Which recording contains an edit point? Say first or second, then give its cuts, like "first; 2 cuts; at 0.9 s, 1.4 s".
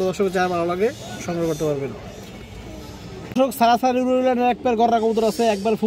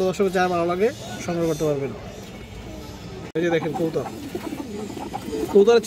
second; 1 cut; at 3.3 s